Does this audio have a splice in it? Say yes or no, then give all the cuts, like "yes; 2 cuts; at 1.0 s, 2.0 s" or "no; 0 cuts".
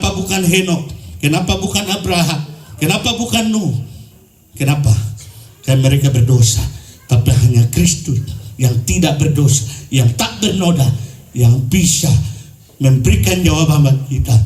no; 0 cuts